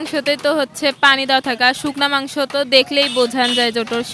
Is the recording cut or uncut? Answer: uncut